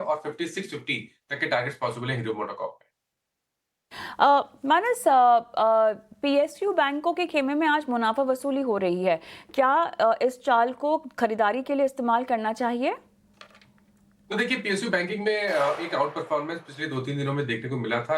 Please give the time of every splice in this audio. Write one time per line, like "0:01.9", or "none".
0:06.1